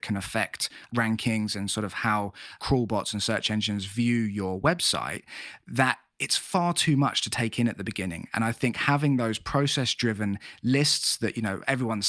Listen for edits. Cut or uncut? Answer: uncut